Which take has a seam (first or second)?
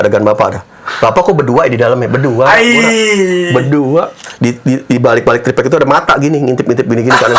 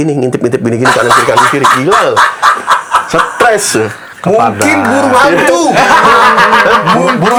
first